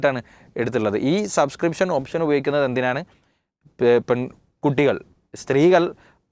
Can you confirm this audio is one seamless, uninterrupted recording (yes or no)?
yes